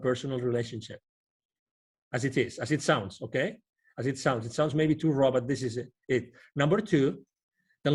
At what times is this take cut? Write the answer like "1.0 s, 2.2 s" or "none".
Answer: none